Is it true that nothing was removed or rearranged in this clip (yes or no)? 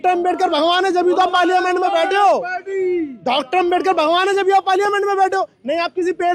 yes